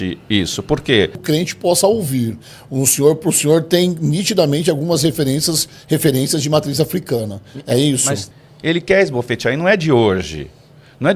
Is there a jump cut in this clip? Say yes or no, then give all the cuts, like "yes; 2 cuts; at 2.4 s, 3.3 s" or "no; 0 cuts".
yes; 2 cuts; at 1.2 s, 8.3 s